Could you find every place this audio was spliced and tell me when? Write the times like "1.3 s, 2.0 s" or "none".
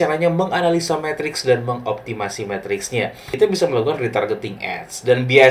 3.3 s